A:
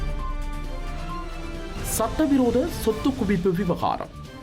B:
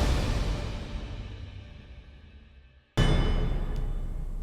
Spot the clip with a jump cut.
B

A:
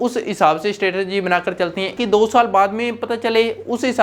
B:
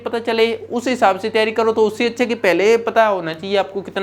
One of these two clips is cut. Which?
A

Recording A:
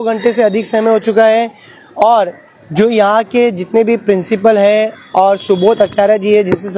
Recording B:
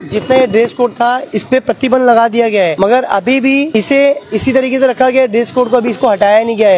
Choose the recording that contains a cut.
B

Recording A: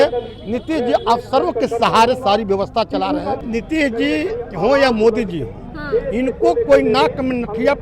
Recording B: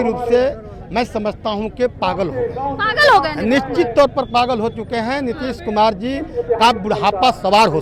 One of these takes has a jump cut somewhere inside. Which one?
A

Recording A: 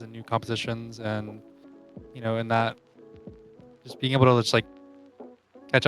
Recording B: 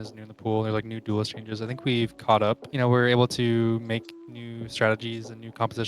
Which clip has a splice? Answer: B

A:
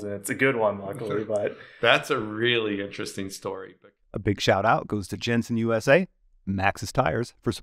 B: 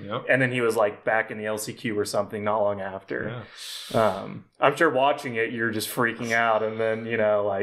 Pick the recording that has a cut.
A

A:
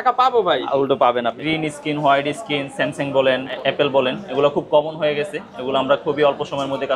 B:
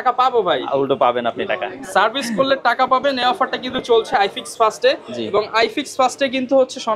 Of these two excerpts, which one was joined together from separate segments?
A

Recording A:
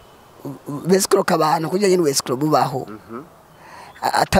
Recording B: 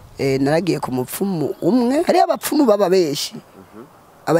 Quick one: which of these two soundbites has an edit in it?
B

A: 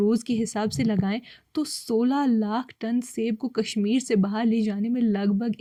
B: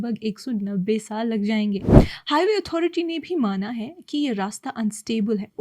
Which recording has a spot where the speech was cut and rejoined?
B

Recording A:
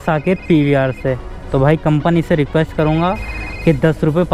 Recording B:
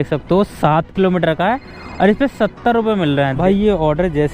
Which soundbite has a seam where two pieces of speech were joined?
B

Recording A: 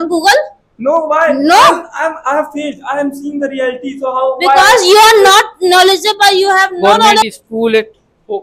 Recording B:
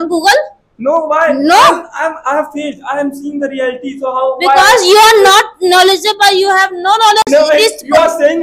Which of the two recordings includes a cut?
A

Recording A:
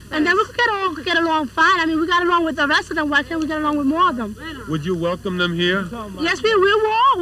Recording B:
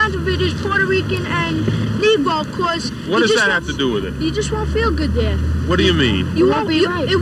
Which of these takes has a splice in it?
B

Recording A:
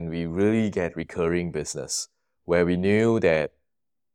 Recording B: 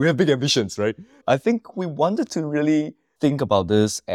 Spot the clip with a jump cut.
B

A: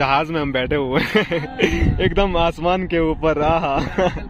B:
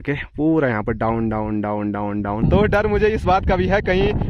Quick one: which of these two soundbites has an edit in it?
B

